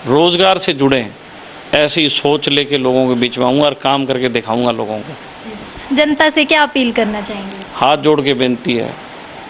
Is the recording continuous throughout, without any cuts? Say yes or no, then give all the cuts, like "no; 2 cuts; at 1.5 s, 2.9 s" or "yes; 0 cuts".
yes; 0 cuts